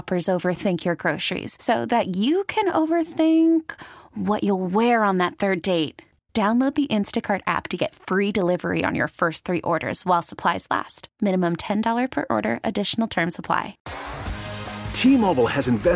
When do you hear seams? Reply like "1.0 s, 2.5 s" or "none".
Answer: 13.8 s